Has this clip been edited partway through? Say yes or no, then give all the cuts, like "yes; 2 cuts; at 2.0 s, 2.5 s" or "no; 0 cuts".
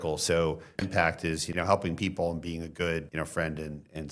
yes; 2 cuts; at 0.9 s, 3.1 s